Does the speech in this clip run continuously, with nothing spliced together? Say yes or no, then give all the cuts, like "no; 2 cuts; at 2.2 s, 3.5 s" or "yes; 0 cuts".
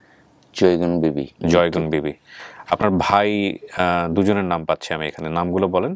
yes; 0 cuts